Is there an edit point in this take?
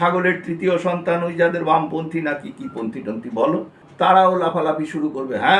yes; 1 cut; at 3.8 s

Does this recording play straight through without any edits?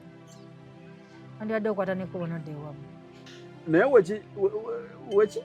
no; 1 cut; at 3.2 s

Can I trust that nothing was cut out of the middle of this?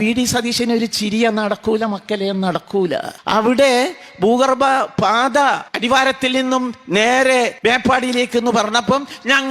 no; 3 cuts; at 3.1 s, 5.7 s, 7.5 s

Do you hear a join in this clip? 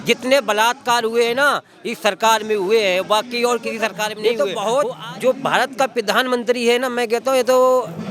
yes; 1 cut; at 4.2 s

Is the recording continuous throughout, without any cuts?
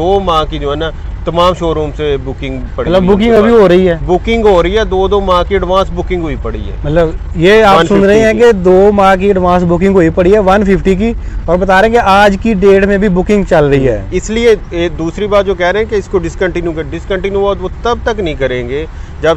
yes; 0 cuts

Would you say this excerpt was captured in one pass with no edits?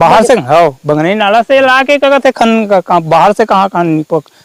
yes; 0 cuts

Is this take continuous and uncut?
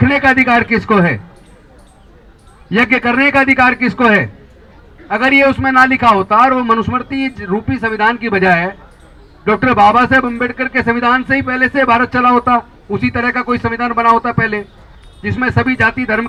yes; 0 cuts

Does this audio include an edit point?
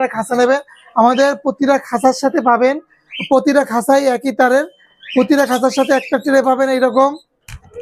no; 0 cuts

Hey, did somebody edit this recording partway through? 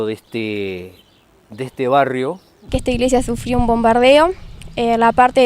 yes; 1 cut; at 2.7 s

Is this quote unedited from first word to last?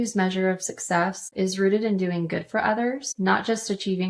no; 2 cuts; at 1.2 s, 3.1 s

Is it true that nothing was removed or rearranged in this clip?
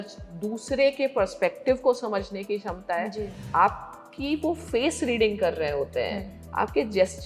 no; 1 cut; at 3.4 s

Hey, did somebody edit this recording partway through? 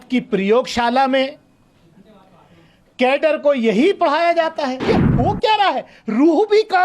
yes; 1 cut; at 4.8 s

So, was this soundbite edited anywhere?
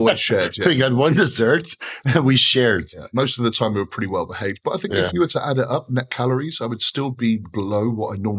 no; 0 cuts

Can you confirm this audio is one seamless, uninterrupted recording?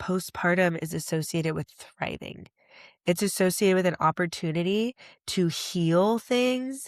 yes; 0 cuts

